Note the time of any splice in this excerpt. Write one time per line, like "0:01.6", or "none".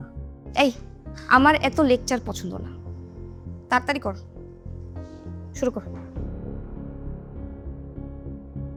none